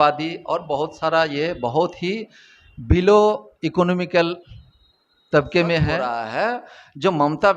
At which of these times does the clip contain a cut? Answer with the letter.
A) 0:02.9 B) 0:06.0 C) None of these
B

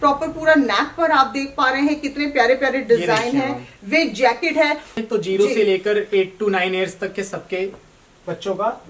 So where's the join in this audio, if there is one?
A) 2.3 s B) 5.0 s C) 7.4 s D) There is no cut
B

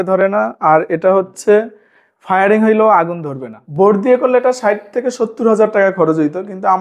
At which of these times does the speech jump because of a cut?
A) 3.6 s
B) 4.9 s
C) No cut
A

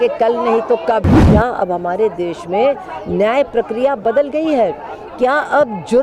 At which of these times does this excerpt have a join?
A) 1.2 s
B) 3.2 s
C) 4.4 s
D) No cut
A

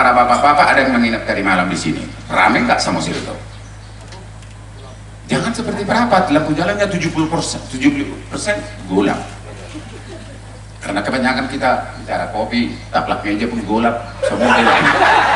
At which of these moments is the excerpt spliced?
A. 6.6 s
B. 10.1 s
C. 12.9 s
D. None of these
D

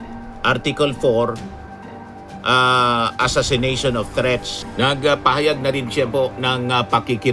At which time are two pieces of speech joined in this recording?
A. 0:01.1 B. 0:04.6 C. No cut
B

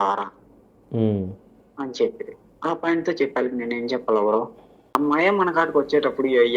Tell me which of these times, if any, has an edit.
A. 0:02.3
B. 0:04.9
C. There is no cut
B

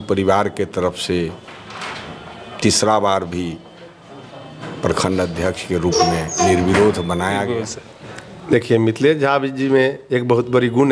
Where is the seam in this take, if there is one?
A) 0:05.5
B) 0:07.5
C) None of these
B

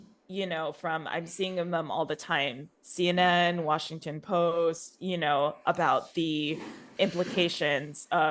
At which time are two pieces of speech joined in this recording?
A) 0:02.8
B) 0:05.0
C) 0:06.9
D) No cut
C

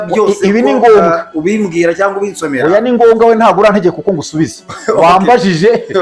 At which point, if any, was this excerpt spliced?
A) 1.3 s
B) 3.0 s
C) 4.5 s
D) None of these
D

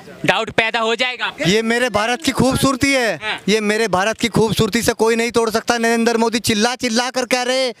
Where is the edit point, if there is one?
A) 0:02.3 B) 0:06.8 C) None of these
C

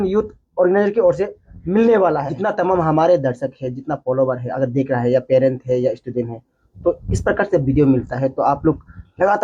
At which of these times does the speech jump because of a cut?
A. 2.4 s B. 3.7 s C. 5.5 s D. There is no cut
A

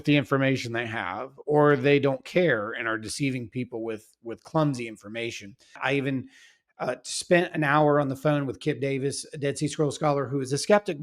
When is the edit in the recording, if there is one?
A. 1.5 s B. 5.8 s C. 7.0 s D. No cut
B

